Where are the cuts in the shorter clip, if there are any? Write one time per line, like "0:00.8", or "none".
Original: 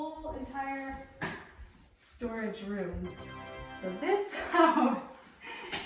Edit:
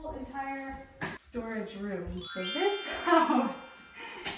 0:01.2
0:02.3